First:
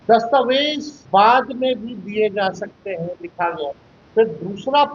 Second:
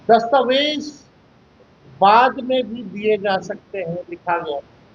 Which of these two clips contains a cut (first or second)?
first